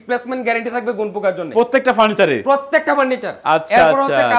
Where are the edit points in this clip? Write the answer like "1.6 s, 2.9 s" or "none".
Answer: none